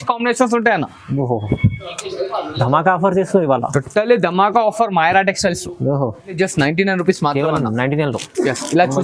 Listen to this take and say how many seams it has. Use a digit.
1